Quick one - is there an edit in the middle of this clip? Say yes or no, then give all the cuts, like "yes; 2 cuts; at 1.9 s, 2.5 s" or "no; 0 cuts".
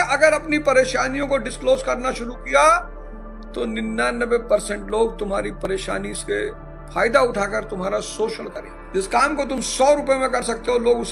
no; 0 cuts